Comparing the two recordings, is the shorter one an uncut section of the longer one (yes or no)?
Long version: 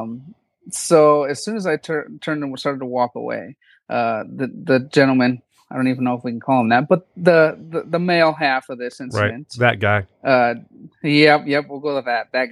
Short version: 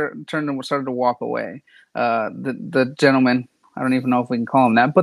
yes